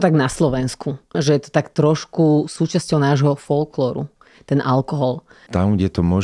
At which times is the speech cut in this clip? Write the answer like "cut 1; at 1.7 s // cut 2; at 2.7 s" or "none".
cut 1; at 1.2 s // cut 2; at 5.4 s